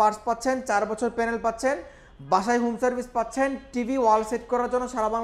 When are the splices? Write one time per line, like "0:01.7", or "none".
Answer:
none

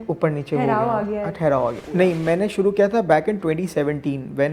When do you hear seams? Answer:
0:01.8

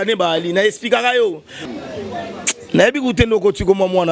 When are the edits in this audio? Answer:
0:01.5

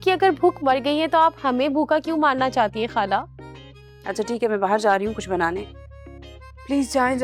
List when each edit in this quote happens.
none

